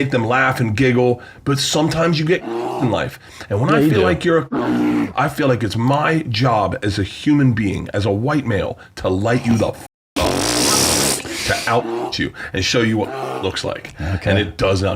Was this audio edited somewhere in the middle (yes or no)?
no